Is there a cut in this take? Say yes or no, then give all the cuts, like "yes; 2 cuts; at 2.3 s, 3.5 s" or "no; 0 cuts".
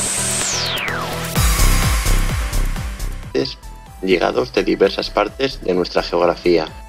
no; 0 cuts